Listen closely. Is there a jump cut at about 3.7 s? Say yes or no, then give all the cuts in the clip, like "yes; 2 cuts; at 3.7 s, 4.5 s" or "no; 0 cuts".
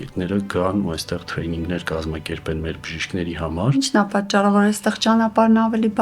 yes; 1 cut; at 3.7 s